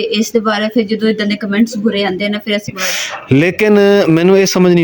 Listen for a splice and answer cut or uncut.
cut